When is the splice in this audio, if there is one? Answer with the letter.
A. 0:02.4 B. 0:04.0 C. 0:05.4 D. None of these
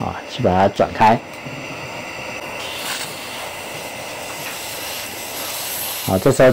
A